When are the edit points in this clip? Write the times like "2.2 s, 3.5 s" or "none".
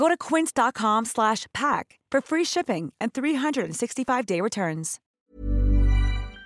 5.0 s